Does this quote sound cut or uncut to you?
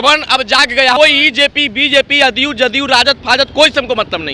cut